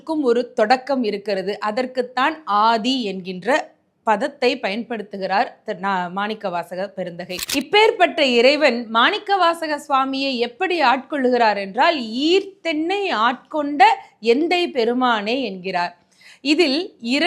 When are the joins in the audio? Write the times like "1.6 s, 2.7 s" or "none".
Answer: 7.3 s